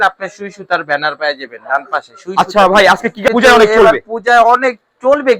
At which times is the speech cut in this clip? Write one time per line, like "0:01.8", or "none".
0:03.3